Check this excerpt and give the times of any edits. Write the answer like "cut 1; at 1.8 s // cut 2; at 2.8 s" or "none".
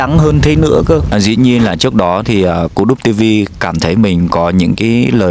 cut 1; at 1.1 s